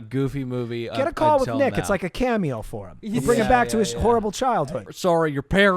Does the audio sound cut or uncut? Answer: cut